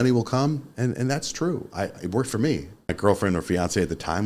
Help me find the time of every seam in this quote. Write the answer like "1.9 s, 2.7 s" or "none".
2.8 s